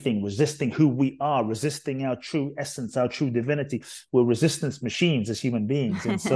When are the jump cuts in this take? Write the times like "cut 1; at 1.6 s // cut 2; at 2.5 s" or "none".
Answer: none